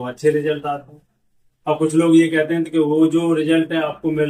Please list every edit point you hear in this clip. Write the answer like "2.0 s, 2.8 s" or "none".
none